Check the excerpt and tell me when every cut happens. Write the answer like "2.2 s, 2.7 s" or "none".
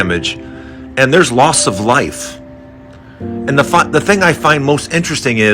none